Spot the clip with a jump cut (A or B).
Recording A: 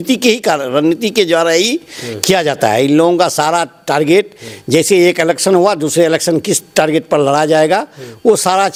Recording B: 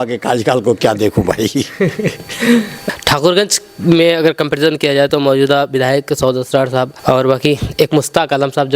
B